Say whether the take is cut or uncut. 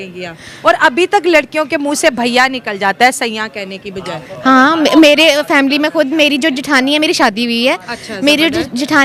uncut